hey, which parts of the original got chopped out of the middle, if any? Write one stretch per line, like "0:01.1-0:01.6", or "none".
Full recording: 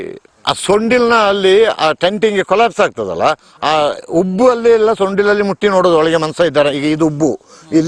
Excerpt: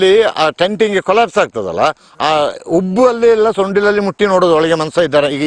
none